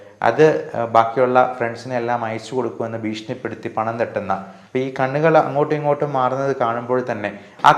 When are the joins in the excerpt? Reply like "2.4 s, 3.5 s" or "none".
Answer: 4.5 s